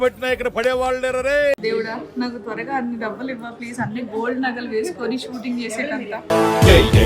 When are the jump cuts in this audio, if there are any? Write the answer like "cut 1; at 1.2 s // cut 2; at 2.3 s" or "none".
cut 1; at 1.6 s